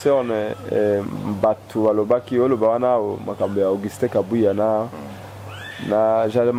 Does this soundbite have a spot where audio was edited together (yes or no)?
no